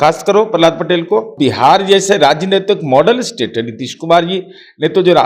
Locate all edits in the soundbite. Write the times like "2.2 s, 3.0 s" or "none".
1.3 s